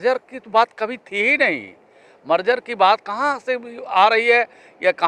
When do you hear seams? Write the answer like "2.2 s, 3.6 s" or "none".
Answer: none